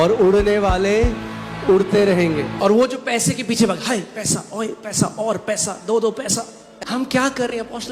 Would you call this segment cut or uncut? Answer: cut